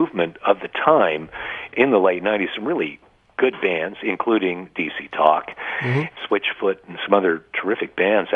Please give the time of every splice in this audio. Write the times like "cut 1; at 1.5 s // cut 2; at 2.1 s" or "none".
cut 1; at 1.7 s // cut 2; at 6.1 s

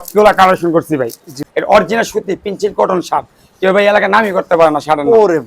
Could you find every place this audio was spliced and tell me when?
cut 1; at 1.3 s

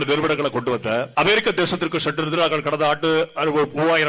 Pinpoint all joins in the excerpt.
cut 1; at 1.1 s

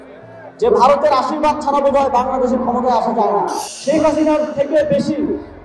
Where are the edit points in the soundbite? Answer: cut 1; at 3.7 s

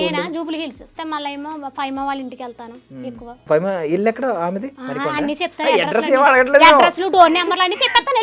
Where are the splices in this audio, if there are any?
cut 1; at 1.0 s // cut 2; at 3.4 s // cut 3; at 4.8 s

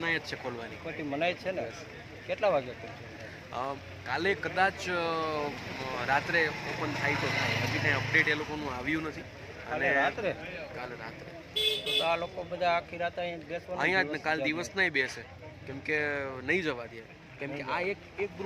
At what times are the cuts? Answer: none

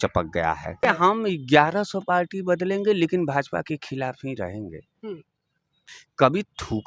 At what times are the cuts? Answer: cut 1; at 0.9 s // cut 2; at 5.7 s

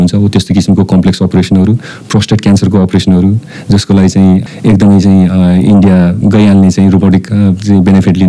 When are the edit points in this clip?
cut 1; at 4.5 s // cut 2; at 6.2 s

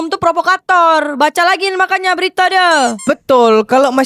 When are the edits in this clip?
none

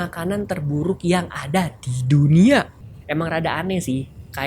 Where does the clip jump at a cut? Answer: cut 1; at 2.7 s

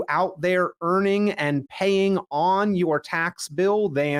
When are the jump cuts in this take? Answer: none

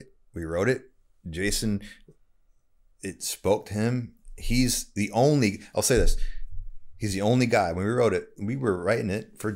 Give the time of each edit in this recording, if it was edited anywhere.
none

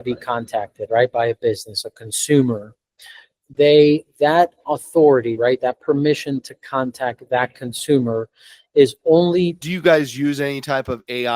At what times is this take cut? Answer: cut 1; at 9.6 s

